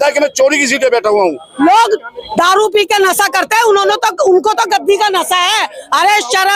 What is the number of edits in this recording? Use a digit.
1